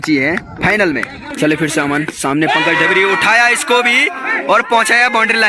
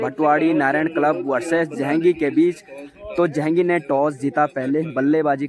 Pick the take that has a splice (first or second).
first